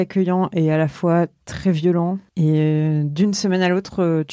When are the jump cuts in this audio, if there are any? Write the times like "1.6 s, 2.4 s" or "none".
2.2 s

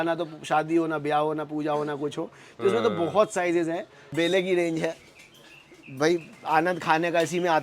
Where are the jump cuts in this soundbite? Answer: 4.1 s

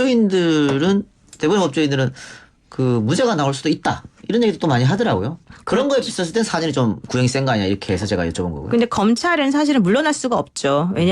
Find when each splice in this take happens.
2.0 s

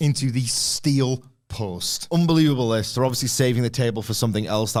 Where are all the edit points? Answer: none

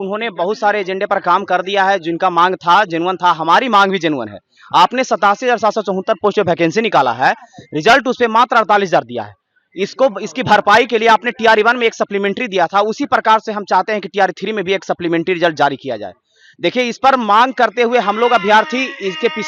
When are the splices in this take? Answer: none

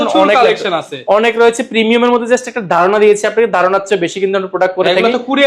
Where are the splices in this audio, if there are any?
none

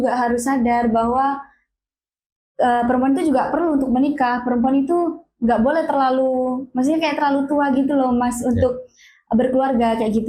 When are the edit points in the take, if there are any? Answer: none

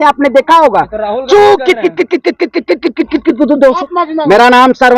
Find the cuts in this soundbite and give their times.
3.8 s

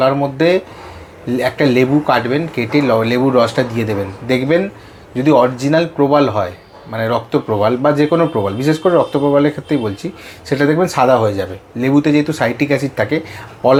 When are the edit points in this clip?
none

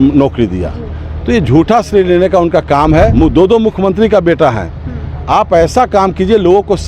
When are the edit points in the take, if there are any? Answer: 3.1 s

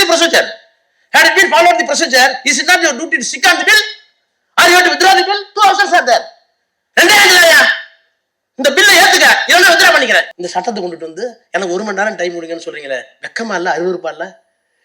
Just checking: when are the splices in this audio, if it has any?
10.4 s

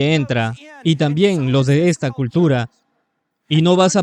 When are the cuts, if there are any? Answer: none

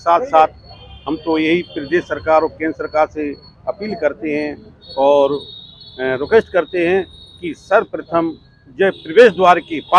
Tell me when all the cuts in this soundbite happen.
none

